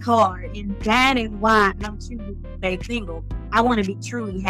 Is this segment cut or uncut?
cut